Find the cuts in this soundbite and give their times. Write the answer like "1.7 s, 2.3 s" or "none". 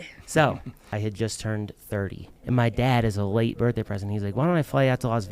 0.9 s, 2.3 s